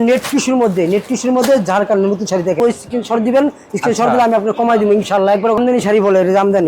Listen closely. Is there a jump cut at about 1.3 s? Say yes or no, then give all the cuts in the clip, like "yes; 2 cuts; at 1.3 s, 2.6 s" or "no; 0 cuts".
no; 2 cuts; at 2.6 s, 5.6 s